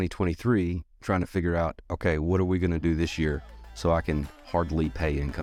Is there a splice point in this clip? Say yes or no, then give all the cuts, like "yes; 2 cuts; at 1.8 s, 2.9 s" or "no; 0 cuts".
no; 0 cuts